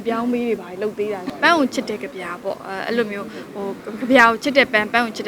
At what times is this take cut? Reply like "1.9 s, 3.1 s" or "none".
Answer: 1.3 s